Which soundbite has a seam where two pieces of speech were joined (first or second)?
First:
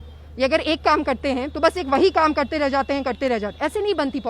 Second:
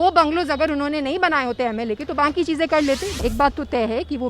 second